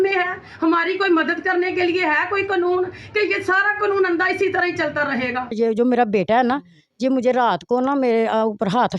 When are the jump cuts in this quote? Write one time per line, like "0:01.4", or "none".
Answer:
0:05.5